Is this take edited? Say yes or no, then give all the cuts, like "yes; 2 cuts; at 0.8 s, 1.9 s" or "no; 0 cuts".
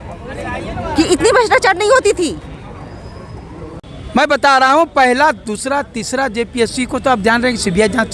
yes; 1 cut; at 3.8 s